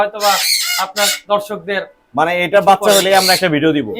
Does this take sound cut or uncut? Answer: uncut